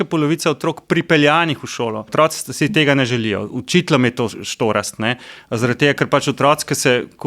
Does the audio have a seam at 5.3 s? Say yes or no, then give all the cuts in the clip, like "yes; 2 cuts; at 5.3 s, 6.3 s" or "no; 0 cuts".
no; 1 cut; at 2.1 s